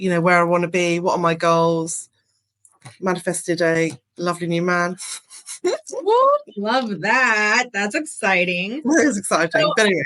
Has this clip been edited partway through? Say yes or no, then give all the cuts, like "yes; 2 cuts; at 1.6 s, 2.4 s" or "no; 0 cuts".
no; 0 cuts